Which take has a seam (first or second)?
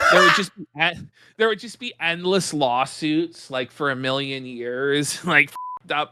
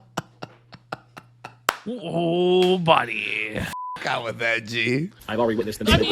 second